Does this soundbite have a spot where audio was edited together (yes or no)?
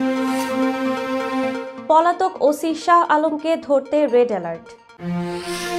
yes